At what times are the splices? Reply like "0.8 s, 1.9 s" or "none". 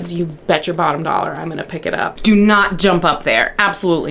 2.1 s